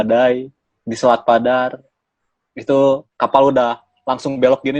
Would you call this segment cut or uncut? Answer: uncut